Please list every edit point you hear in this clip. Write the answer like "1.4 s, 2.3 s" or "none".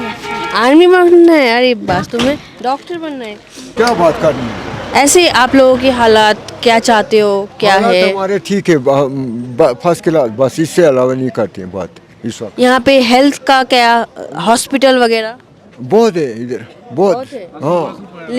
3.7 s